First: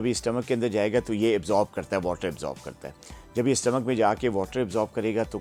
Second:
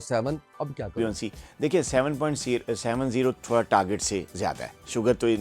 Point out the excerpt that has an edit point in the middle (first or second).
second